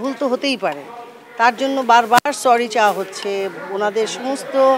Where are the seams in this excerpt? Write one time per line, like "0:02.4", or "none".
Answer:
none